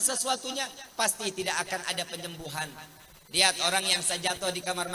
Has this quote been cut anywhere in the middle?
no; 0 cuts

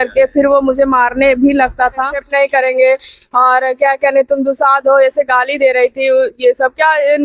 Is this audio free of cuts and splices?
no; 1 cut; at 2.1 s

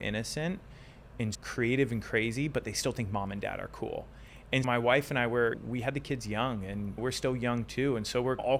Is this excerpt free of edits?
yes; 0 cuts

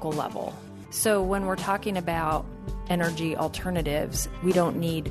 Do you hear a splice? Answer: no; 0 cuts

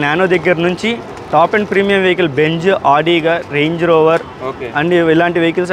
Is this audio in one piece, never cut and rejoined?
yes; 0 cuts

